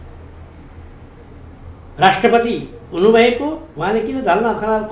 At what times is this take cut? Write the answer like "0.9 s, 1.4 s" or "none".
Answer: 3.7 s